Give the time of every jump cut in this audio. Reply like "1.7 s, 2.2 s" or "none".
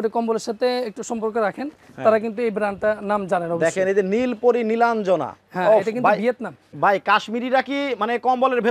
6.6 s